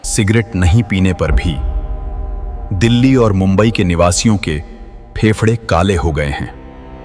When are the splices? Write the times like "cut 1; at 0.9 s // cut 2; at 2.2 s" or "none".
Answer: none